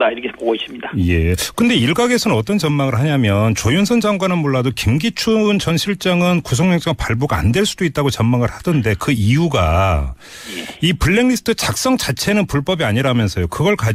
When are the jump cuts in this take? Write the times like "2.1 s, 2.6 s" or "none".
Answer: none